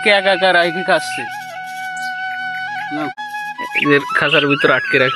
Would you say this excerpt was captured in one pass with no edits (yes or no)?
no